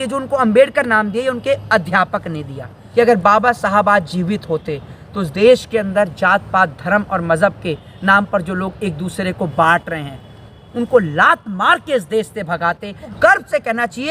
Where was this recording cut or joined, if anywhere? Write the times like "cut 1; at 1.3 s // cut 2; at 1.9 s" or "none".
cut 1; at 2.8 s // cut 2; at 13.1 s